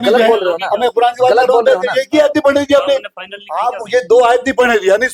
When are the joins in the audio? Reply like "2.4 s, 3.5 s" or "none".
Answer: none